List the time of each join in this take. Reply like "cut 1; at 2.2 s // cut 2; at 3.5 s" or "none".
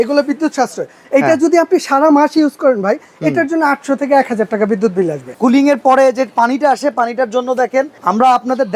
cut 1; at 1.0 s // cut 2; at 5.3 s // cut 3; at 8.0 s